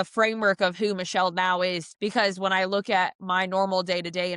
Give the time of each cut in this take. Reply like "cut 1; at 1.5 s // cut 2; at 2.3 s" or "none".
cut 1; at 1.9 s